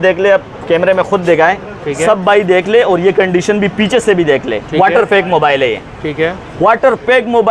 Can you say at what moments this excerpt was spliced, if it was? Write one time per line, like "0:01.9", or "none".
none